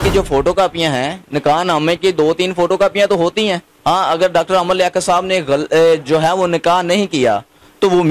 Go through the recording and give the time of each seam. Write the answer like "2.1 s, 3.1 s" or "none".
3.7 s